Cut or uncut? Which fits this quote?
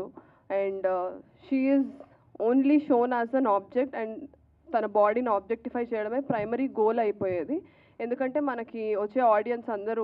uncut